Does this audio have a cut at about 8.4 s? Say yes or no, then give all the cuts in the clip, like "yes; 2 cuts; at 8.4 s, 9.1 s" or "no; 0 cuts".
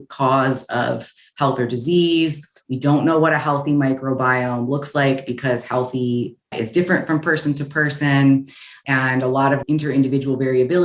no; 0 cuts